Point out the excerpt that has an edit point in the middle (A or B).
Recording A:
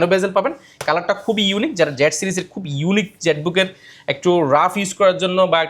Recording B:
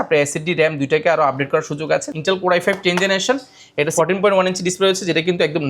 B